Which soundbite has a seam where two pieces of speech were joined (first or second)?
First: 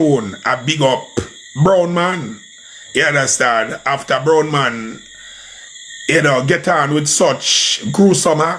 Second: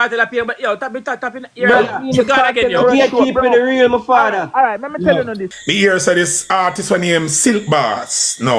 second